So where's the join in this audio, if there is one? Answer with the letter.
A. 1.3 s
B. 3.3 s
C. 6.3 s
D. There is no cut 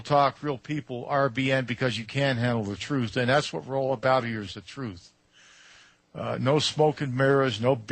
B